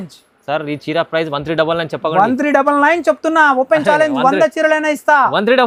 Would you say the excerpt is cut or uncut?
uncut